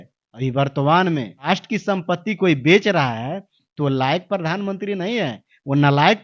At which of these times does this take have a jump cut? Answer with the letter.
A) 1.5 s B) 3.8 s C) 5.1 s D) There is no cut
A